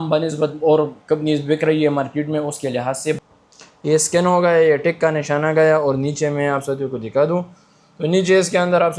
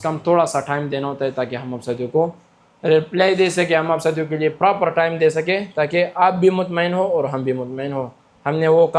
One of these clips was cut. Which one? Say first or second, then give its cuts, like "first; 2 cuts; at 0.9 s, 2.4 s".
first; 1 cut; at 3.2 s